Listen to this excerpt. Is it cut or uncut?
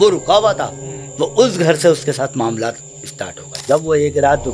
cut